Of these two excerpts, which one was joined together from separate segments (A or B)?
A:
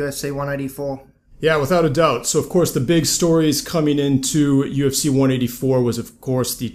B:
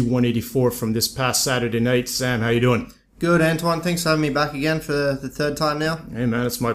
A